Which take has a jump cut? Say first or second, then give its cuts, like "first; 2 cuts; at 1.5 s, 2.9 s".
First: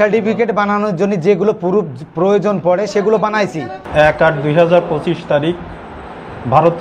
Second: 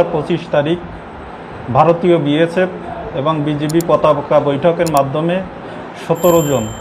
first; 1 cut; at 3.8 s